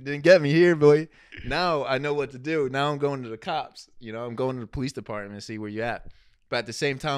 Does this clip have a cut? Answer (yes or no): no